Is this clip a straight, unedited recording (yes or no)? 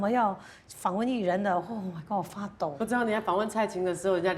no